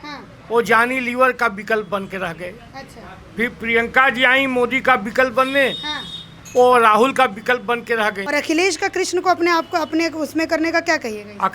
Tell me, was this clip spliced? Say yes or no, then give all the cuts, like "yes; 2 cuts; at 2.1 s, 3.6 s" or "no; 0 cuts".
yes; 1 cut; at 8.2 s